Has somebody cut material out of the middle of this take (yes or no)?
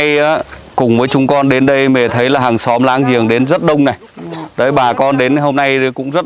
no